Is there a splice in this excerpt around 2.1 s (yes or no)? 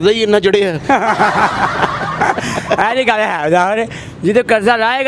no